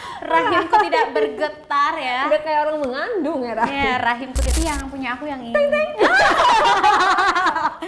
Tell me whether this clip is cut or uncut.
cut